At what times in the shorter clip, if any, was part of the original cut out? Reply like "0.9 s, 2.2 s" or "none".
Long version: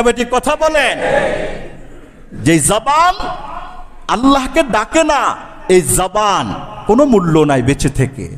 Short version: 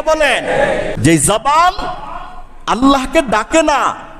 0.9 s